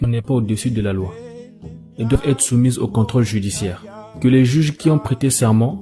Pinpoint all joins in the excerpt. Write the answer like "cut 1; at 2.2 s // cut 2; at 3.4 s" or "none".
none